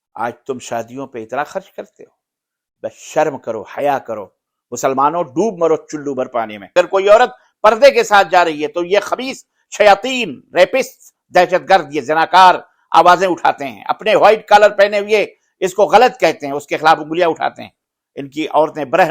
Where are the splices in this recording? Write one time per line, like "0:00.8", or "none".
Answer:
0:06.7